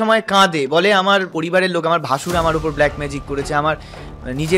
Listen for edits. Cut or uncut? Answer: cut